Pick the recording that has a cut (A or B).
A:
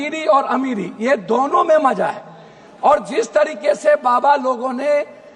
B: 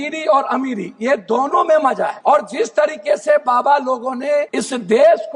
B